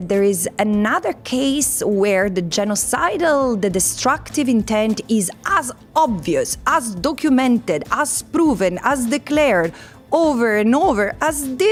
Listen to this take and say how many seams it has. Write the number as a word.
zero